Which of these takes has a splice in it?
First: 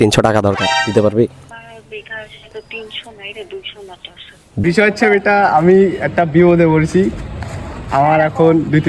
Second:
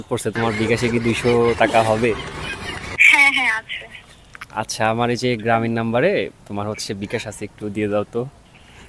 first; 2 cuts; at 1.5 s, 4.6 s

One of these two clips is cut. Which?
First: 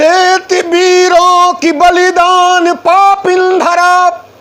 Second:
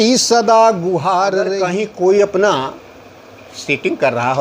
second; 1 cut; at 1.6 s

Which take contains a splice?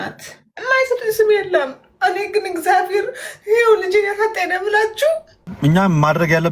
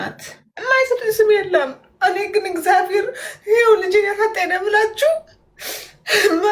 first; 1 cut; at 5.4 s

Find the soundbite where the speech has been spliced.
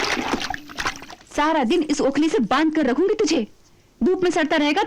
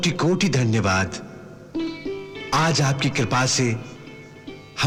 first; 1 cut; at 1.0 s

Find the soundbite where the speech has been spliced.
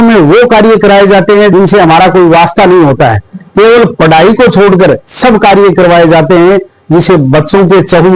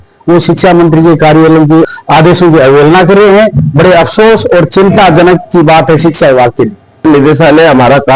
second; 2 cuts; at 1.9 s, 7.0 s

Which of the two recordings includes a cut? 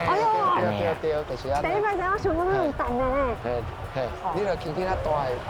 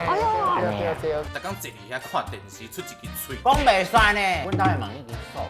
second; 2 cuts; at 1.3 s, 4.4 s

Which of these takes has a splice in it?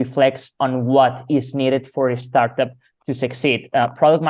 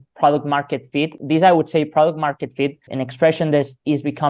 second; 2 cuts; at 1.2 s, 2.8 s

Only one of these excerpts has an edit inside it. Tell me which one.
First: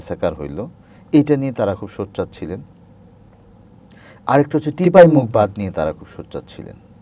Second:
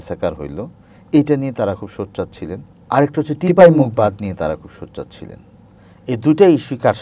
second; 1 cut; at 2.7 s

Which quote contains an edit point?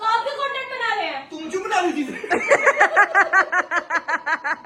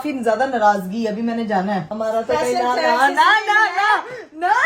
second; 1 cut; at 1.9 s

